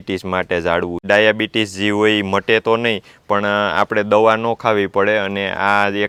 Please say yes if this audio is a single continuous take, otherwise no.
yes